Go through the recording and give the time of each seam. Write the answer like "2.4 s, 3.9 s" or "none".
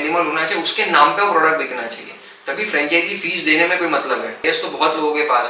4.4 s